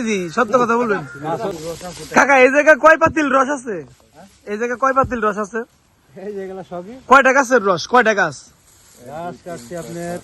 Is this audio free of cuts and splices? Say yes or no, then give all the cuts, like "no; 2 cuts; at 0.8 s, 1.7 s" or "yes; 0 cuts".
no; 1 cut; at 1.5 s